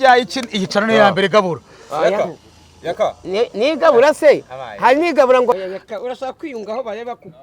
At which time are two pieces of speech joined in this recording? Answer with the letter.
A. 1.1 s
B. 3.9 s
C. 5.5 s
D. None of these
C